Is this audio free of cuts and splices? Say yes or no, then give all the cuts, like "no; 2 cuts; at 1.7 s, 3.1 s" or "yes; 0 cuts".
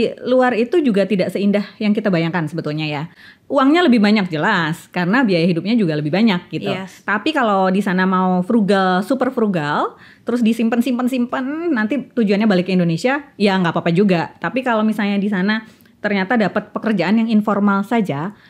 yes; 0 cuts